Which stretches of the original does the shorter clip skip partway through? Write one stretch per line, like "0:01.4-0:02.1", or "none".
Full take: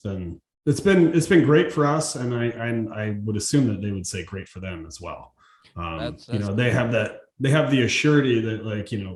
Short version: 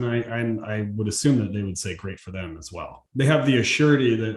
0:05.3-0:07.2